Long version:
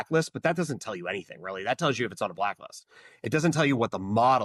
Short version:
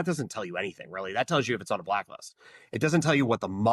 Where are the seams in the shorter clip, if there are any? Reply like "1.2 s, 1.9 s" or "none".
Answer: none